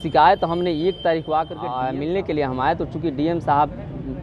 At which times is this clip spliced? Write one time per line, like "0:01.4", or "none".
0:01.7